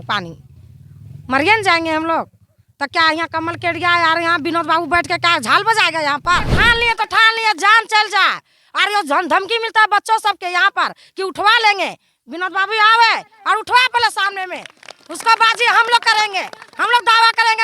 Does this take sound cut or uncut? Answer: cut